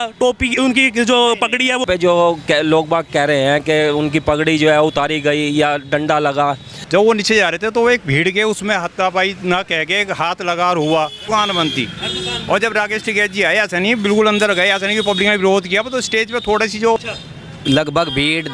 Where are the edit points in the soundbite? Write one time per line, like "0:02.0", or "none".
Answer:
0:01.8
0:06.7
0:11.2
0:17.0